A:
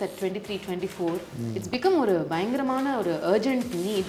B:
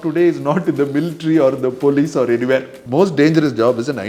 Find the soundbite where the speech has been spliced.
B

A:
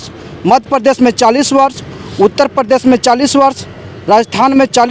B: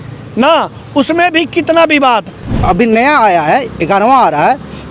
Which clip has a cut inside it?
B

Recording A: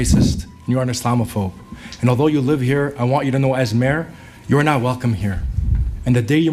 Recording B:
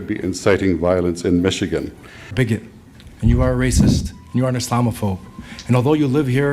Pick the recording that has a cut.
B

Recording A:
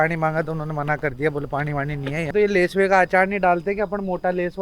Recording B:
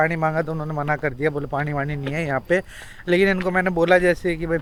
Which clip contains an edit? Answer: A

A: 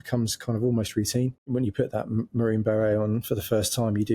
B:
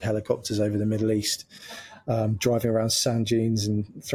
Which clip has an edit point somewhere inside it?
A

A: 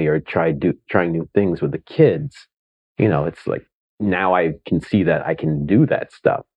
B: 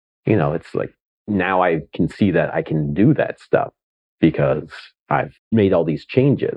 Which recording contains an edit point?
B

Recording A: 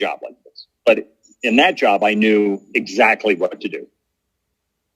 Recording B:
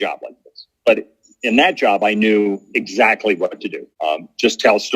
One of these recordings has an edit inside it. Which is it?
B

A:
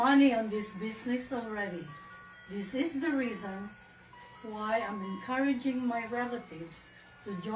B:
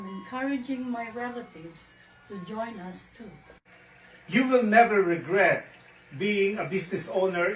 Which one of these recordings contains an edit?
B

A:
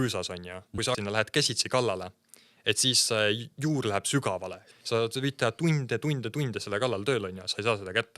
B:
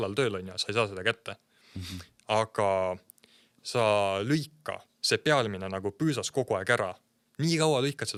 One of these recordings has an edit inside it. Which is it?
A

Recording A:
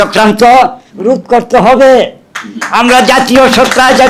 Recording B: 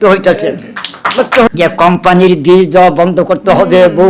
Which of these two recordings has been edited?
B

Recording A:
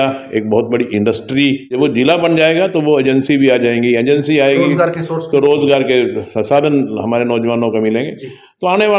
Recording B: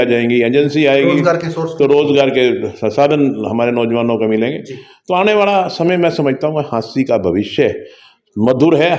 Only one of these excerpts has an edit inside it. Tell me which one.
A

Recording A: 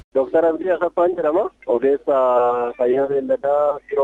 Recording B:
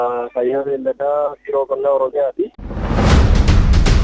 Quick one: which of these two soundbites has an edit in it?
B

